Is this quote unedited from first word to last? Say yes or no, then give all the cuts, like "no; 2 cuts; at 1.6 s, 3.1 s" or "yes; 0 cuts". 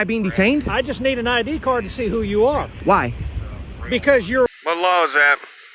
no; 1 cut; at 4.5 s